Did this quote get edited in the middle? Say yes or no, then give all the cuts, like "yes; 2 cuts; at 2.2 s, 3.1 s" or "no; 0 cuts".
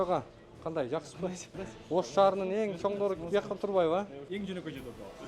yes; 2 cuts; at 1.4 s, 4.2 s